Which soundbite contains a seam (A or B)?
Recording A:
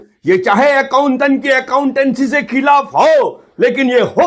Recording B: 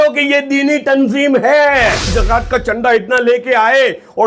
B